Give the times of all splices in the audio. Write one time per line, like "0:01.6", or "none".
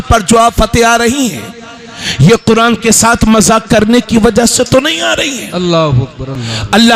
none